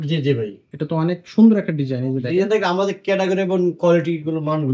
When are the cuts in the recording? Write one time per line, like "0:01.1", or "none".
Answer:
none